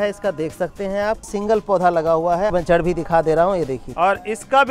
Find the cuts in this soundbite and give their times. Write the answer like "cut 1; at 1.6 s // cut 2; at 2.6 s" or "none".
cut 1; at 1.3 s // cut 2; at 2.5 s // cut 3; at 3.8 s